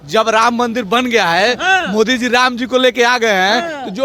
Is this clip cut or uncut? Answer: uncut